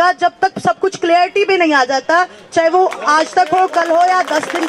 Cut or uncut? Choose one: uncut